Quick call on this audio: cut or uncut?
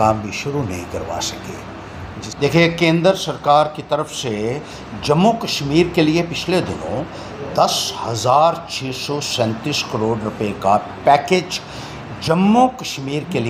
uncut